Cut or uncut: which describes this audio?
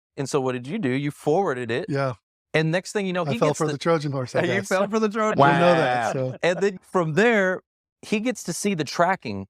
cut